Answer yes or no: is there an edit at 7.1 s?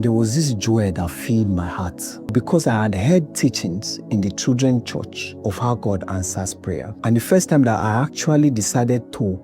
no